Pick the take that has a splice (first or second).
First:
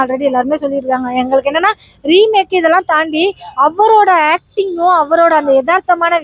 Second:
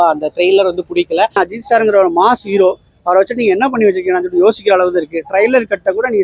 second